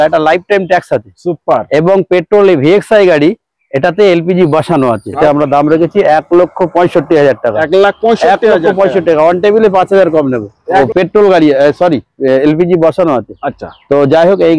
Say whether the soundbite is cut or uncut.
cut